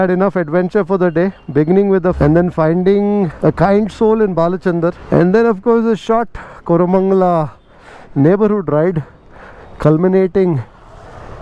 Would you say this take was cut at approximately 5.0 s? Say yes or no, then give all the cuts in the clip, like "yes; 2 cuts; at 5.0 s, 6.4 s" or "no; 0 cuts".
yes; 3 cuts; at 2.2 s, 3.3 s, 5.0 s